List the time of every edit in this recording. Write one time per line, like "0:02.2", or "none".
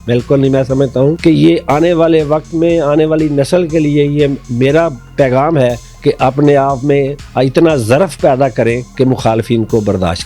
0:01.2
0:05.9
0:07.2
0:08.8